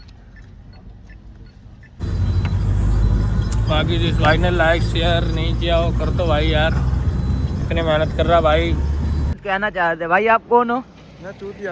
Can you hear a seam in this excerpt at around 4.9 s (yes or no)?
no